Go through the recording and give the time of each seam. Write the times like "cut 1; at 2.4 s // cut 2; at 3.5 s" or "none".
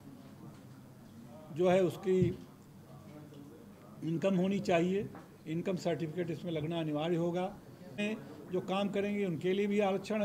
cut 1; at 8.0 s